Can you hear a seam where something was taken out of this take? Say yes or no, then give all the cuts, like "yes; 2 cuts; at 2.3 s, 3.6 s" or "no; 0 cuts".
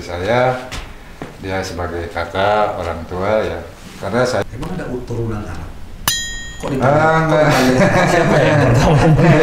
yes; 1 cut; at 4.4 s